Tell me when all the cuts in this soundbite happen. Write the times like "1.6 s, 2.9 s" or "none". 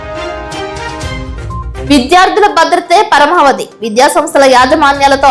0.9 s